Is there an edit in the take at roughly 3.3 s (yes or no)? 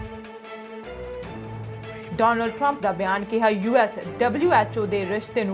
no